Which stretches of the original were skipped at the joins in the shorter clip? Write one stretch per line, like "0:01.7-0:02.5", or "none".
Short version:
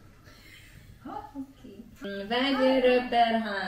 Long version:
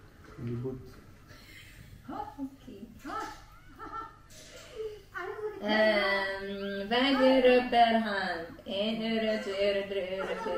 0:03.0-0:06.6